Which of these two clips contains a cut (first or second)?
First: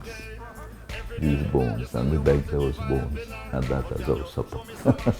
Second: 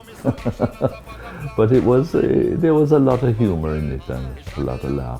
first